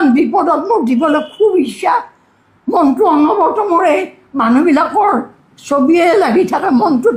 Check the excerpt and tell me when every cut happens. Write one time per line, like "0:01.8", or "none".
none